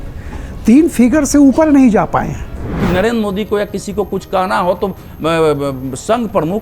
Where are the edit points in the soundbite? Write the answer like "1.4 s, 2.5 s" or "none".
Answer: 2.7 s